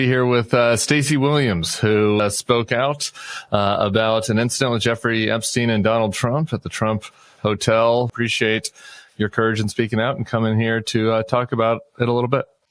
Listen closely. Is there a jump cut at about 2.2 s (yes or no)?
yes